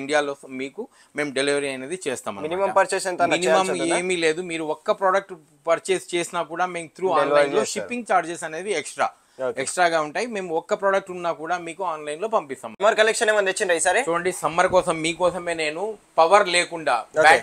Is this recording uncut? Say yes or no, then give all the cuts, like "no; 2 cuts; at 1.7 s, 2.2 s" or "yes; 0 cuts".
no; 1 cut; at 12.7 s